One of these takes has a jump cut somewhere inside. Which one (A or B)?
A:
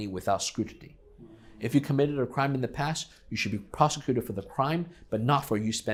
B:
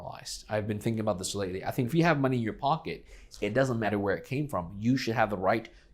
B